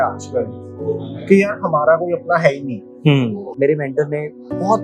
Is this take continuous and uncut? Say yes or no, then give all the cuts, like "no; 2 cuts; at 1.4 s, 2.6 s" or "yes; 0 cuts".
no; 1 cut; at 3.5 s